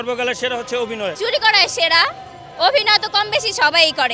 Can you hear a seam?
yes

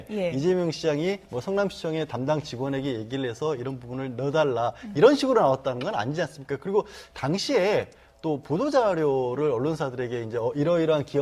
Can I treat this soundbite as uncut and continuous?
no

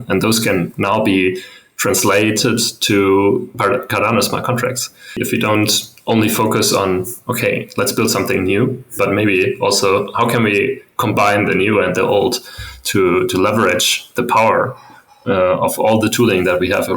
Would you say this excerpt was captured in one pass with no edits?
no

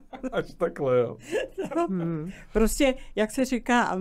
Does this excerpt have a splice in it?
no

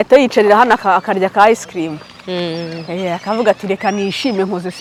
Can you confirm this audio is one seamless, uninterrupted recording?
yes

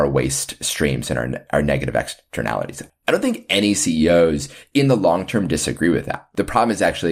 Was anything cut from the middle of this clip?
yes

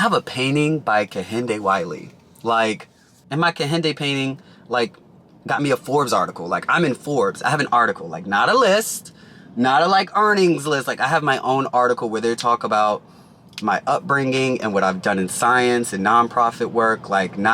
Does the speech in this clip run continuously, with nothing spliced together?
yes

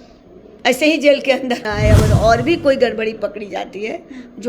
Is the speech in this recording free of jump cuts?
no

